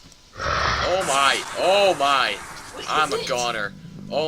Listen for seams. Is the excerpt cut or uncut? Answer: uncut